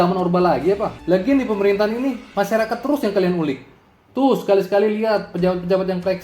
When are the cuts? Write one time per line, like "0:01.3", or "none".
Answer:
0:00.9

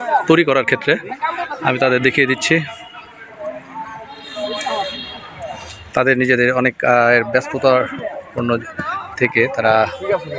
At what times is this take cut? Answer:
none

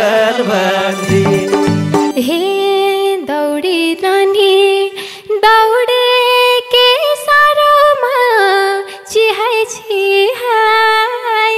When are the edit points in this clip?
0:02.1

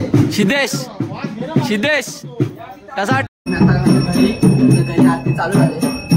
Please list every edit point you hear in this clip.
0:03.3

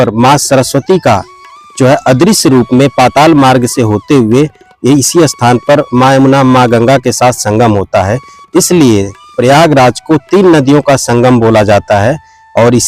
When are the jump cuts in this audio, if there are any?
none

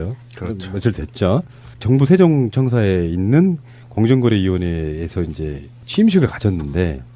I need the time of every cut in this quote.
0:04.4

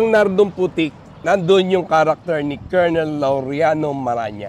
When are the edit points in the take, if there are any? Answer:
none

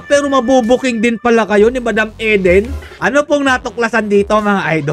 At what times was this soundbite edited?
0:03.0

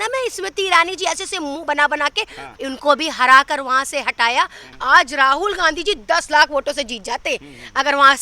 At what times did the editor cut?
0:02.5
0:04.7

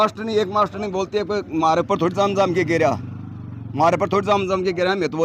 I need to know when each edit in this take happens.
none

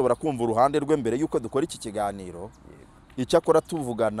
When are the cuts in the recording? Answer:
none

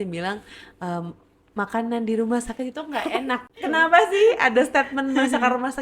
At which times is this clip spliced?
0:03.4

